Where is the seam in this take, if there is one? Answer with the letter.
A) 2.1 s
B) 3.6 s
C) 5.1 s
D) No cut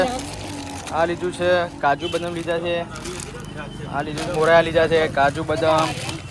D